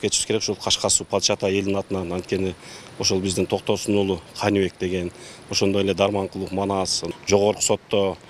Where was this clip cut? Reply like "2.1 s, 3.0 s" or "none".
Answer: 7.0 s